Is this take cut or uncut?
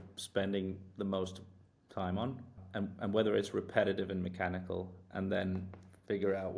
cut